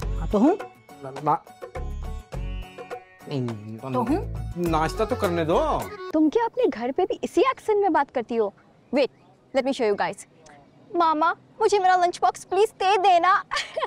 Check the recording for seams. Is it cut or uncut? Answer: cut